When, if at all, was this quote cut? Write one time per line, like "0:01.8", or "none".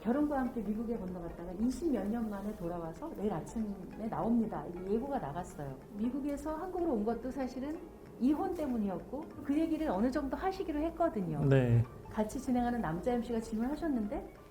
0:05.8
0:09.4
0:12.0